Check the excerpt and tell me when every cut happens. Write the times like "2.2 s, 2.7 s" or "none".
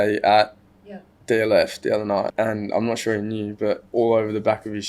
2.3 s, 3.8 s